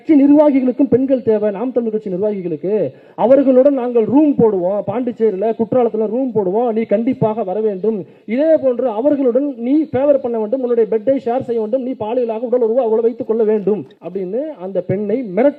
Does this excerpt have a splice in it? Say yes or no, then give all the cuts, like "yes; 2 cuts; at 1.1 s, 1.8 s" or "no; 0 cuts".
no; 0 cuts